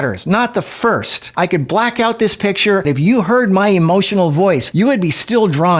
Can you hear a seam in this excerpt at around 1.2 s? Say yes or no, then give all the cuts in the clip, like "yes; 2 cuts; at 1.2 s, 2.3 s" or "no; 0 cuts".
yes; 1 cut; at 1.2 s